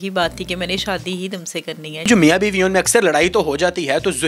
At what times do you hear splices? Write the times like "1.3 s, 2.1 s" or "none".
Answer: 1.9 s